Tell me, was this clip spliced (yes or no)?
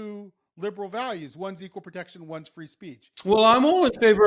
yes